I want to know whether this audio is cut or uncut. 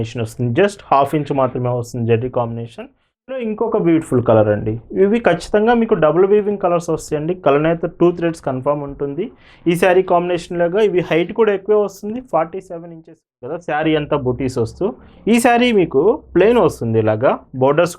cut